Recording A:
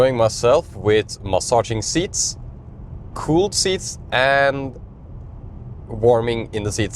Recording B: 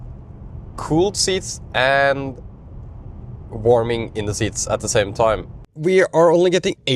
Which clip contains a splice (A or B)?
B